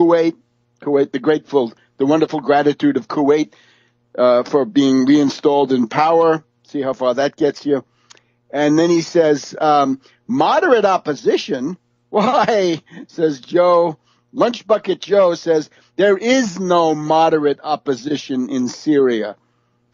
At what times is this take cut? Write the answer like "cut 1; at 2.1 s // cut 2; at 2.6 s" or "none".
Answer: cut 1; at 18.8 s